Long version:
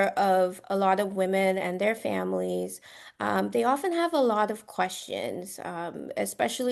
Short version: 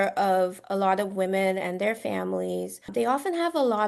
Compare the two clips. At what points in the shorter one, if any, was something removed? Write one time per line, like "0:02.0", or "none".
0:02.9